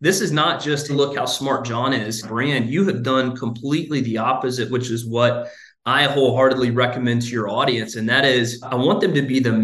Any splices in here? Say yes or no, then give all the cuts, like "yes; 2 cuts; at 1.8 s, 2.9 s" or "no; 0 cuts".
yes; 2 cuts; at 0.9 s, 8.6 s